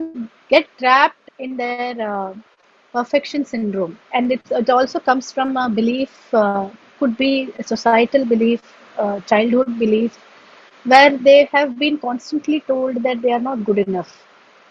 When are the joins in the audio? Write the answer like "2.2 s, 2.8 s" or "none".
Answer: 1.2 s, 4.0 s